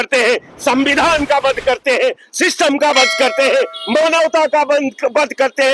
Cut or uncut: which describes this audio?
uncut